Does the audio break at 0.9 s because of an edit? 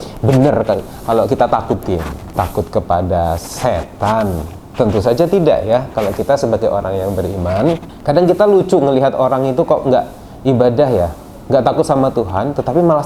no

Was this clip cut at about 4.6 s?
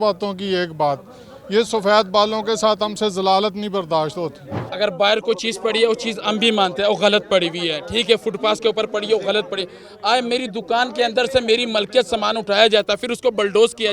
yes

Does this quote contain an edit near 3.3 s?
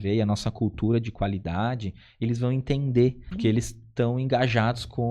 yes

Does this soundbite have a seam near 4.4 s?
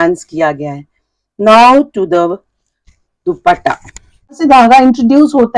yes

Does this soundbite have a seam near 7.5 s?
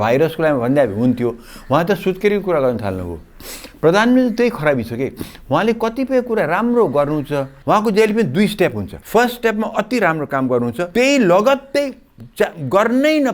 yes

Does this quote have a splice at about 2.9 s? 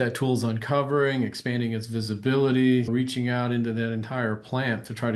yes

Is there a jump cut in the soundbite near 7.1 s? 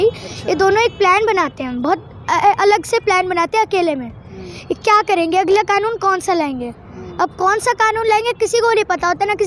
no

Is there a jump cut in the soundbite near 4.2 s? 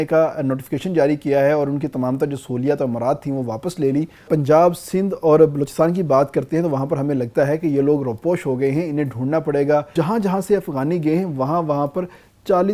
yes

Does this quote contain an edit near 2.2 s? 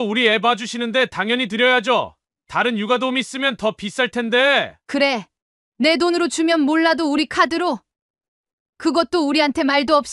no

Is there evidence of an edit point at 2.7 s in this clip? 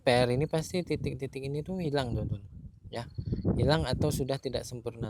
no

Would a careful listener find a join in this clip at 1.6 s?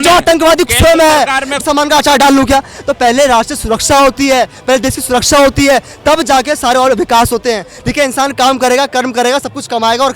yes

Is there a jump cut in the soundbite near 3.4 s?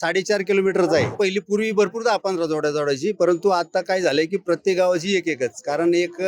no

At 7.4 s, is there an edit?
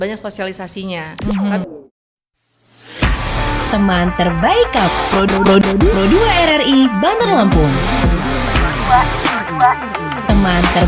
no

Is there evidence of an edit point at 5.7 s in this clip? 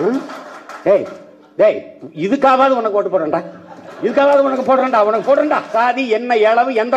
yes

